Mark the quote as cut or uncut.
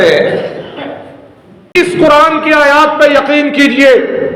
cut